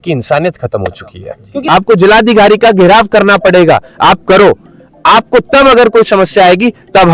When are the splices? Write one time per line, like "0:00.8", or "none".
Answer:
0:01.6